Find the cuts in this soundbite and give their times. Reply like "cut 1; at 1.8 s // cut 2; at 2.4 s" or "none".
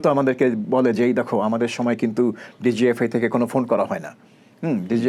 none